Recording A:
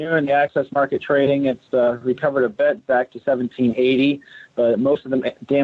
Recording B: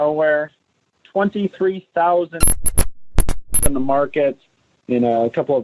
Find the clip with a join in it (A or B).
A